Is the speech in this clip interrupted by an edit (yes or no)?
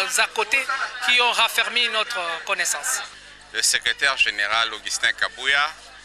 yes